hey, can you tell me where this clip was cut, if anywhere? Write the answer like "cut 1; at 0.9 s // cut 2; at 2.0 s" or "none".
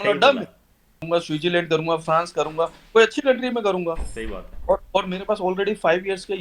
cut 1; at 1.0 s